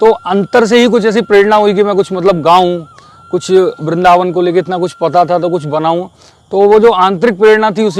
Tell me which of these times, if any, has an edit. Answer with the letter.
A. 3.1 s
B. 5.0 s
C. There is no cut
C